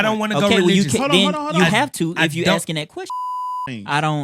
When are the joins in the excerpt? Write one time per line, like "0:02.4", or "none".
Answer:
0:03.3